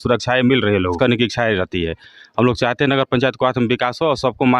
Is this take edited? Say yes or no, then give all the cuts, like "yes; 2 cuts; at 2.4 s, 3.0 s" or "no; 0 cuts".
yes; 1 cut; at 1.0 s